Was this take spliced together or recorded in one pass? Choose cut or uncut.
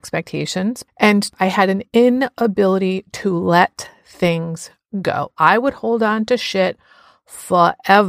cut